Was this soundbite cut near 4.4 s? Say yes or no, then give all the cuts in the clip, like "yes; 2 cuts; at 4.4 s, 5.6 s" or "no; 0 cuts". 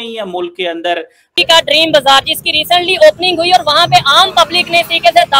no; 1 cut; at 1.4 s